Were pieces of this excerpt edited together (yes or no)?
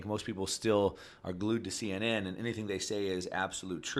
no